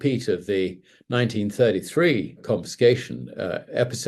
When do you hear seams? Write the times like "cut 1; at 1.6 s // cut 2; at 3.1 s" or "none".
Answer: cut 1; at 2.4 s